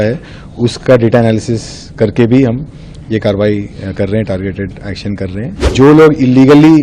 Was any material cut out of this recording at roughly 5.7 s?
yes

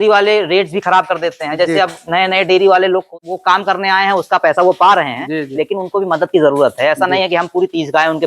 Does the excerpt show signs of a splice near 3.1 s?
yes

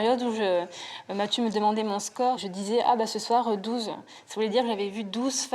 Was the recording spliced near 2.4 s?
yes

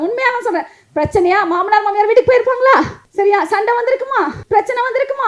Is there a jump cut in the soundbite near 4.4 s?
yes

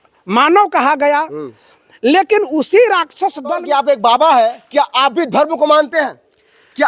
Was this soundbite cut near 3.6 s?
yes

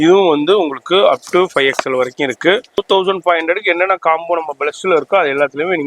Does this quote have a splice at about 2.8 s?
yes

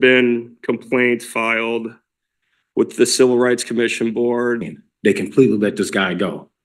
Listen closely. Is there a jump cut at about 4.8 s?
yes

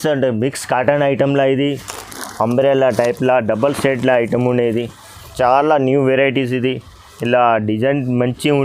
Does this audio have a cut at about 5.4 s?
no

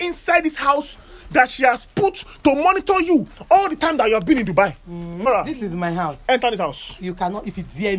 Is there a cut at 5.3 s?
yes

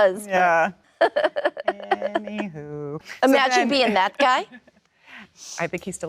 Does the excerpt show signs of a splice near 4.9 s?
no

